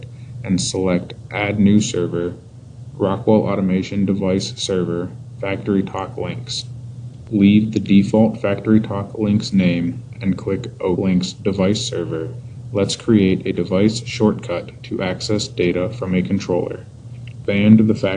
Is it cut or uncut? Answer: cut